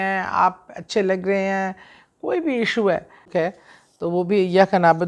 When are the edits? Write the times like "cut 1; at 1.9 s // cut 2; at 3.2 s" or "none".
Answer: cut 1; at 3.2 s